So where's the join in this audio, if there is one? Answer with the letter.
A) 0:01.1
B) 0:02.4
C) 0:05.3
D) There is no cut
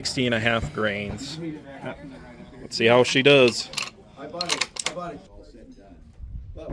C